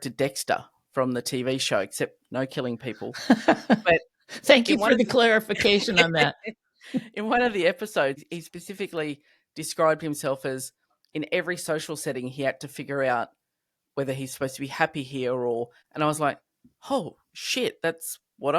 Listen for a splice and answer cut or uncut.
cut